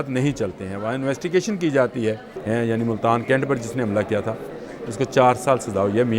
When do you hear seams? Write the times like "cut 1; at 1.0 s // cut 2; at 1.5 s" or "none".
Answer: cut 1; at 2.3 s